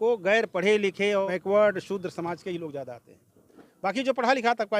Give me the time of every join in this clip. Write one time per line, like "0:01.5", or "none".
0:01.3